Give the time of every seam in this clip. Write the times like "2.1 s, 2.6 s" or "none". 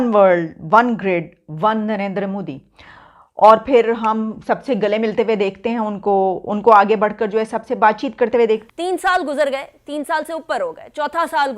8.7 s